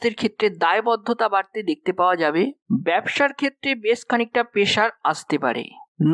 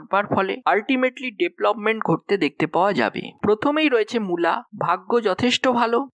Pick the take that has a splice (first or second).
second